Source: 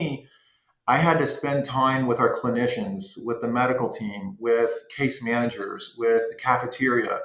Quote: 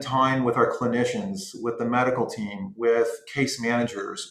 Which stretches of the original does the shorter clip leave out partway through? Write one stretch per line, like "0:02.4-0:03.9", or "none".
none